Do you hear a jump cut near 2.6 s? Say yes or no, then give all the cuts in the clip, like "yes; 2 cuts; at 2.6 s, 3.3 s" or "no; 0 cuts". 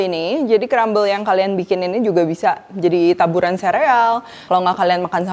no; 1 cut; at 4.3 s